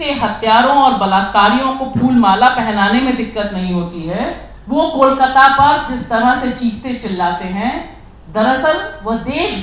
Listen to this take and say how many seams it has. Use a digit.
1